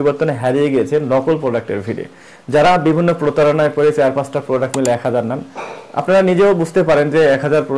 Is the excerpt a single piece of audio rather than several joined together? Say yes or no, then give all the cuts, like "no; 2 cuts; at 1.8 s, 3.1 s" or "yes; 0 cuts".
yes; 0 cuts